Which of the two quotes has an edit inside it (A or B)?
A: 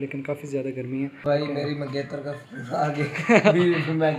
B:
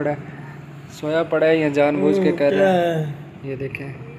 A